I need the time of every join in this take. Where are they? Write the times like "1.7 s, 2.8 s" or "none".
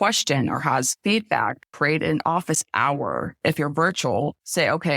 1.6 s, 3.4 s